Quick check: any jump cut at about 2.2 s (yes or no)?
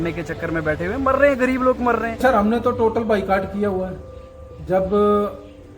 yes